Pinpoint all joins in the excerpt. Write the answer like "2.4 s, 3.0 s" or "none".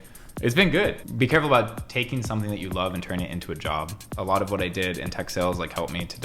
1.0 s, 4.0 s